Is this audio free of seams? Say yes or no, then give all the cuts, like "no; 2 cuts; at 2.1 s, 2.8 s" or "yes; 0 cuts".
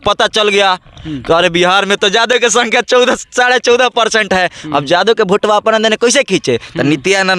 yes; 0 cuts